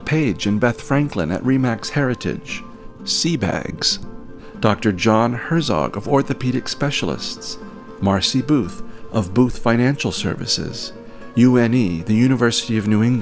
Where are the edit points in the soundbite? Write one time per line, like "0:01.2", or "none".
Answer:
none